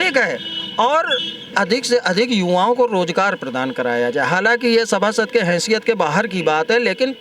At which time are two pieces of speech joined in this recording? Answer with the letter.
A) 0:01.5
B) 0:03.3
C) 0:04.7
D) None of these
A